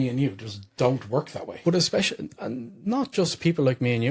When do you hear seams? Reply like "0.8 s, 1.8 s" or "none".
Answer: none